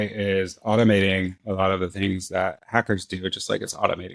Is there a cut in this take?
no; 0 cuts

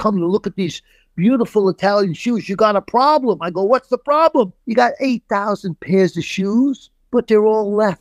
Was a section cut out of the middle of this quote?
yes; 2 cuts; at 4.6 s, 6.9 s

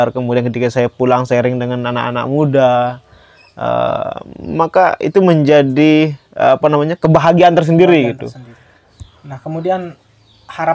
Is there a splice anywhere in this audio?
no; 0 cuts

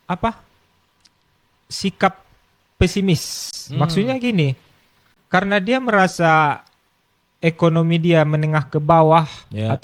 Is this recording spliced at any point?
no; 0 cuts

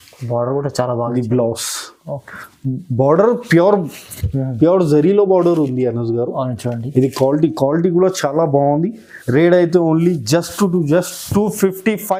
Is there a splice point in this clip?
no; 0 cuts

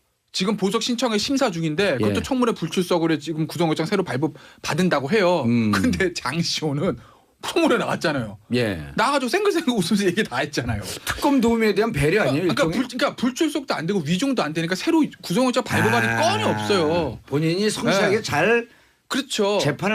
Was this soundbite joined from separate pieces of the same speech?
yes; 1 cut; at 9.3 s

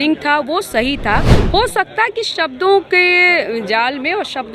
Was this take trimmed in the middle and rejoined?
no; 0 cuts

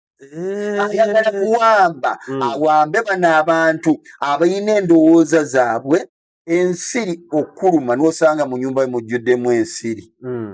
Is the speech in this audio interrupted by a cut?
yes; 1 cut; at 6.2 s

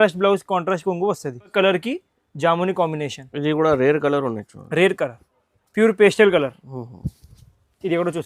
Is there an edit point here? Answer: yes; 1 cut; at 1.5 s

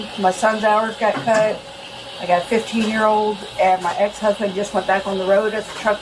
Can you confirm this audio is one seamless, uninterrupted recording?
yes; 0 cuts

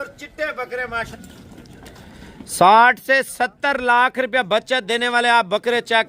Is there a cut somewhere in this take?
yes; 1 cut; at 1.1 s

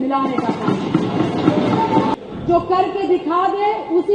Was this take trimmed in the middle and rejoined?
yes; 1 cut; at 2.1 s

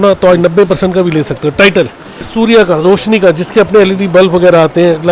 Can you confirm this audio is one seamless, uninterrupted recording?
no; 1 cut; at 2.3 s

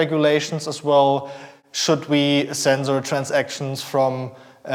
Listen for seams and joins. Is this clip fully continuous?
yes; 0 cuts

